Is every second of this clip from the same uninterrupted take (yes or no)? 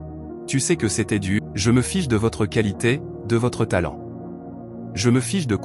no